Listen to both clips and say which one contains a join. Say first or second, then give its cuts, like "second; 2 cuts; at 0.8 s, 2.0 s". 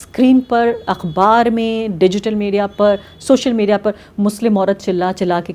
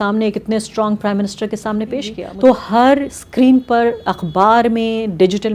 second; 1 cut; at 2.2 s